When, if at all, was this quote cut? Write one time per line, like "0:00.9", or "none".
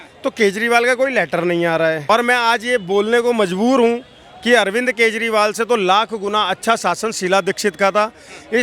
0:02.0